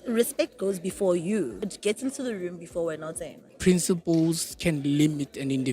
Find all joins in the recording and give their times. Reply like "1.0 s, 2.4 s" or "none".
1.6 s, 3.5 s